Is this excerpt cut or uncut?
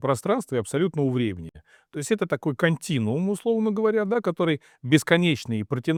uncut